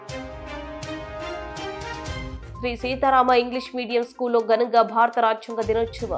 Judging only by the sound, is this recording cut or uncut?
uncut